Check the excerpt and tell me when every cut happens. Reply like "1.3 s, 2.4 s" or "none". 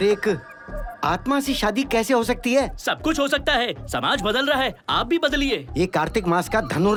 none